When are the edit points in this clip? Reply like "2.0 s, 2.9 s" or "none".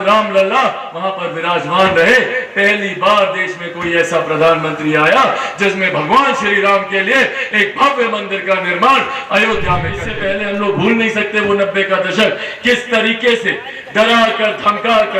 10.1 s

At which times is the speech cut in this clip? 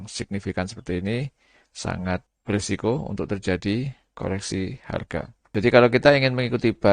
2.3 s, 5.4 s

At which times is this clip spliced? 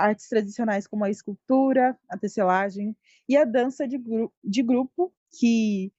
none

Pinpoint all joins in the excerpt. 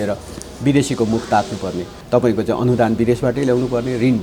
1.9 s

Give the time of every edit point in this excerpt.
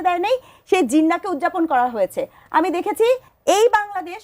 3.3 s

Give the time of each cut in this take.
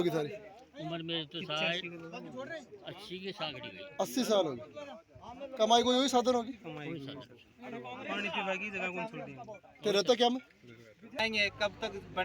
11.2 s

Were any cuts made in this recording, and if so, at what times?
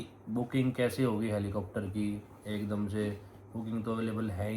none

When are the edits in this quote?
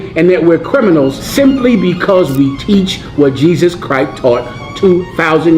1.2 s, 4.6 s

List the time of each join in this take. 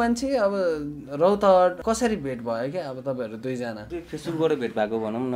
1.8 s, 3.9 s

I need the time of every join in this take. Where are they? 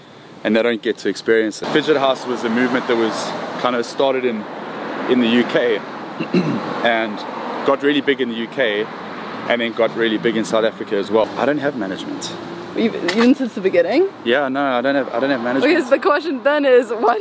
1.6 s, 11.2 s

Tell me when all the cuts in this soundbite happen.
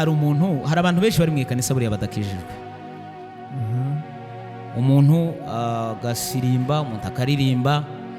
none

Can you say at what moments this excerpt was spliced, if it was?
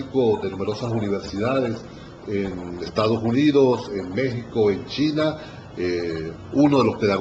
3.9 s

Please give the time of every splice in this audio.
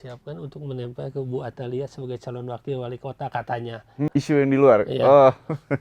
4.1 s

